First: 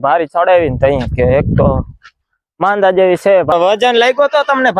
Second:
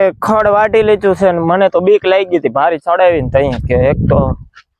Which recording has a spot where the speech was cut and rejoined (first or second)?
first